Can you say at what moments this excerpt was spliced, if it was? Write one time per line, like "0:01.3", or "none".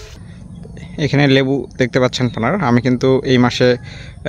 none

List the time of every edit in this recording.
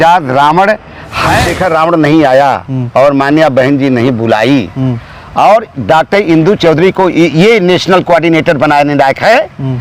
0:01.4

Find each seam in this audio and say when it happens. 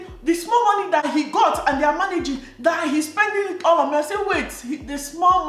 0:01.0

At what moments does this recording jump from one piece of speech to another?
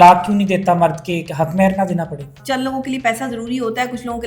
0:02.4

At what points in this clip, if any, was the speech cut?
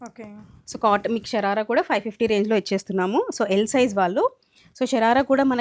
none

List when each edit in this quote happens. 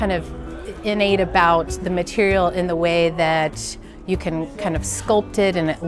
none

